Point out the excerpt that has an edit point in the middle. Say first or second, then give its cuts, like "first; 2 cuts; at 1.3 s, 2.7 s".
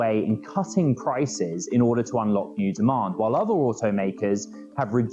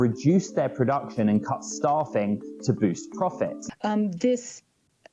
second; 1 cut; at 3.6 s